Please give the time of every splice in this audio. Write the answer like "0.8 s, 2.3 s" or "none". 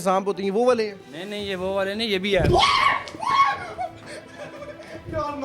none